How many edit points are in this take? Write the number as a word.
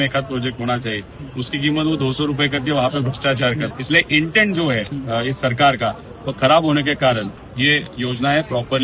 three